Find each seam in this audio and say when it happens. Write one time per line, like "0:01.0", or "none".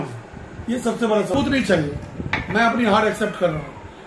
0:01.3